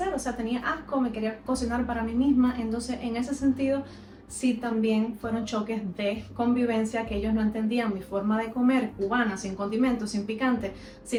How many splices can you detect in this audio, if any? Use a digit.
0